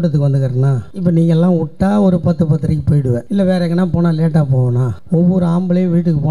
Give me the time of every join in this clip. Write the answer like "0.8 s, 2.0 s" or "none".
0.9 s, 3.2 s, 4.9 s